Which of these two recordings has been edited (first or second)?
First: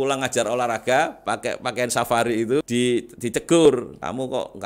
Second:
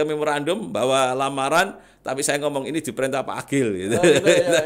first